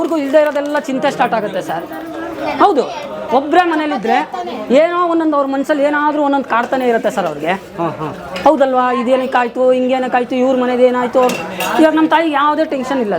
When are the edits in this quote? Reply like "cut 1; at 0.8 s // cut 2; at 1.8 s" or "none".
none